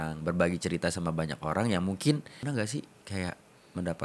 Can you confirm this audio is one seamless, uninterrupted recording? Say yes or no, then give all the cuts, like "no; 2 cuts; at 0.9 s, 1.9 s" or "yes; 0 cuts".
no; 1 cut; at 2.3 s